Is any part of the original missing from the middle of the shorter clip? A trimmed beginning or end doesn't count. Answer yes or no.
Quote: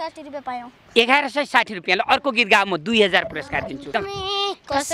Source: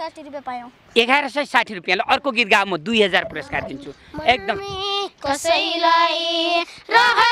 yes